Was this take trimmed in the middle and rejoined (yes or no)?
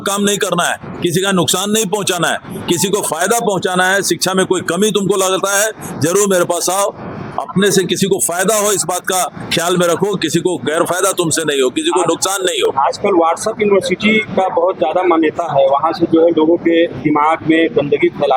no